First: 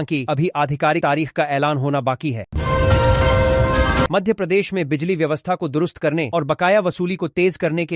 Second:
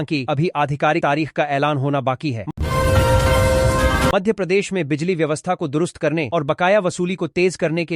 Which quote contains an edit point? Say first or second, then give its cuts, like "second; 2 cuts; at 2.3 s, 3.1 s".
second; 2 cuts; at 2.5 s, 4.1 s